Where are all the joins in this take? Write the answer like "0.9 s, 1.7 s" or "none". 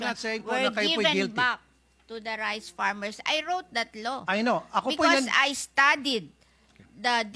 none